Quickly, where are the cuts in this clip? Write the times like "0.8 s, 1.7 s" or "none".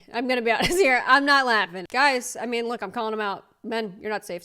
1.8 s